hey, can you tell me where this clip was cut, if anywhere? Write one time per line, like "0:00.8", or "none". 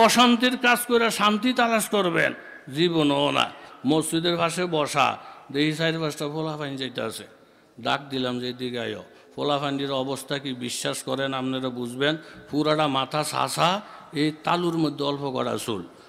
0:03.7